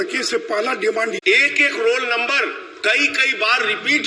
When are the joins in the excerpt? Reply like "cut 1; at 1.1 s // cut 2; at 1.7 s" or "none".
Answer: cut 1; at 1.2 s